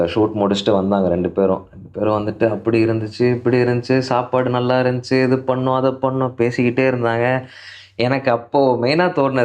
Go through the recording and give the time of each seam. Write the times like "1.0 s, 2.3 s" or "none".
none